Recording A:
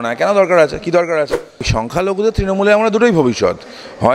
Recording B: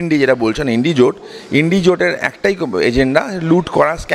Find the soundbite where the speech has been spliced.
A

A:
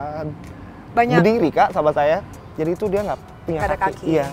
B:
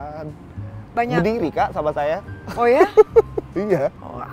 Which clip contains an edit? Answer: A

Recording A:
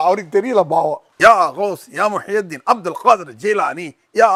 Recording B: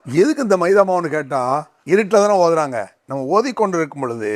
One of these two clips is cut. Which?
B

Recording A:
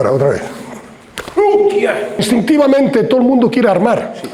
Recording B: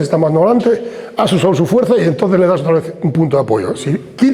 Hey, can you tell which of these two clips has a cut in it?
A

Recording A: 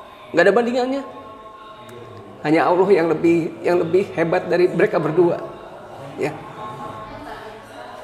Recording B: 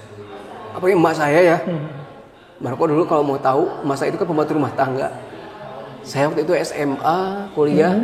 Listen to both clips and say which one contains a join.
A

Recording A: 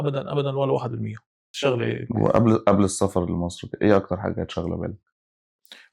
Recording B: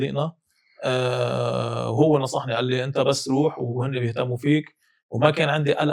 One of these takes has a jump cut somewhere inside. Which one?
A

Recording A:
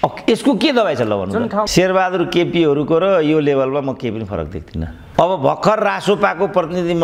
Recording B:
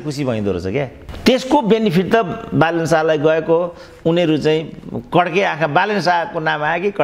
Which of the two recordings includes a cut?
A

